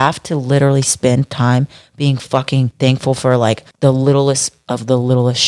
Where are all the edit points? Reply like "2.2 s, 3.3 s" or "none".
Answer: 2.7 s, 3.7 s